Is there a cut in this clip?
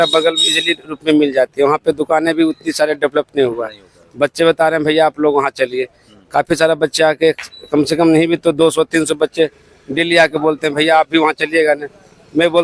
no; 0 cuts

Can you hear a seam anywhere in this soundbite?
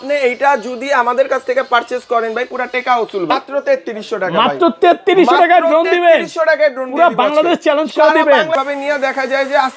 yes; 2 cuts; at 3.3 s, 8.5 s

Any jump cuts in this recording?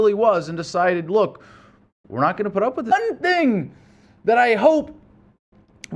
no; 0 cuts

